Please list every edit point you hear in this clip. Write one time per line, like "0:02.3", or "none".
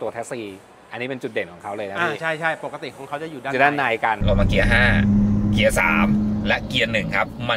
0:04.2